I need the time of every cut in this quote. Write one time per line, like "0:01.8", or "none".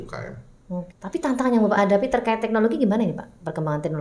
0:00.9